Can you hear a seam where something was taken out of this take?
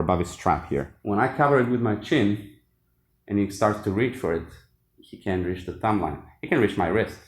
yes; 1 cut; at 0.9 s

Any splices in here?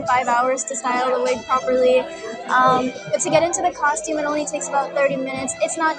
no; 0 cuts

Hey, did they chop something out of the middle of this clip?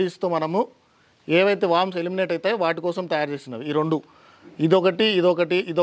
no; 0 cuts

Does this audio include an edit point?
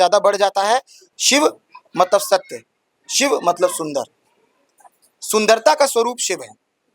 yes; 1 cut; at 1.0 s

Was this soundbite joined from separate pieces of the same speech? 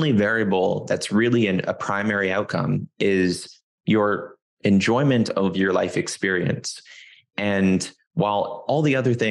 no; 0 cuts

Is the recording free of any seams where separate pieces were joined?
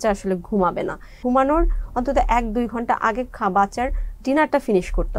no; 1 cut; at 1.2 s

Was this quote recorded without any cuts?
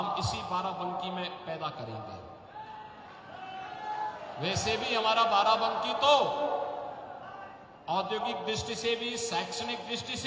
yes; 0 cuts

